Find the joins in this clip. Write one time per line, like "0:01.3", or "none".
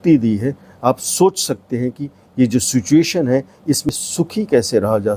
0:03.9